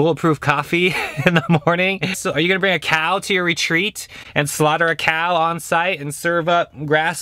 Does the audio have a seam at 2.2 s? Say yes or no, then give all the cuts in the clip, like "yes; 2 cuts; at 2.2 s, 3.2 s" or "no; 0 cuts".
yes; 1 cut; at 2.2 s